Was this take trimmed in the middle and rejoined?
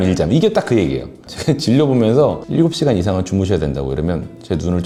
no; 0 cuts

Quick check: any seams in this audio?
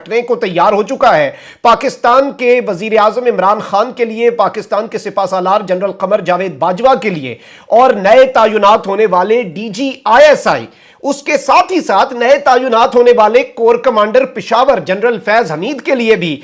no; 0 cuts

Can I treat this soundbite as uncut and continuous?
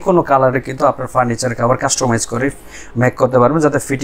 yes; 0 cuts

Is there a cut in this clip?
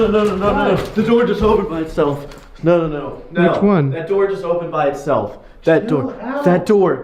no; 0 cuts

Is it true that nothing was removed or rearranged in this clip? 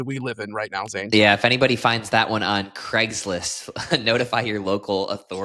yes; 0 cuts

